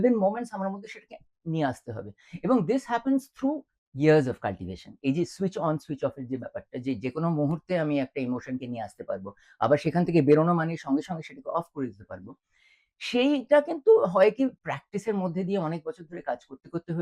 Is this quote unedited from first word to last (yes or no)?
yes